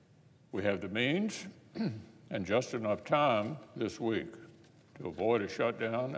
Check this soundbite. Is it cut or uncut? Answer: cut